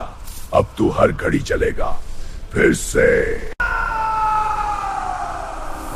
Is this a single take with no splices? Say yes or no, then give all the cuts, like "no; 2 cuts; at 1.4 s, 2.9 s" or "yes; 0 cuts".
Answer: no; 1 cut; at 3.6 s